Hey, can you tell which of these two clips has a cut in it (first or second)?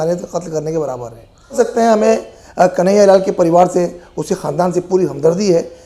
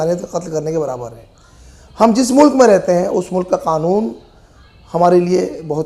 first